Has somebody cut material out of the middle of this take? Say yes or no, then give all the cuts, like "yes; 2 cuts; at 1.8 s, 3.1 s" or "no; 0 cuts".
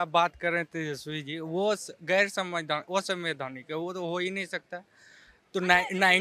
no; 0 cuts